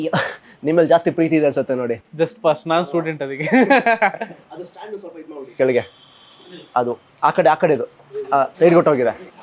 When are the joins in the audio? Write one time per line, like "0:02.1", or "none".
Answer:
0:07.1
0:08.5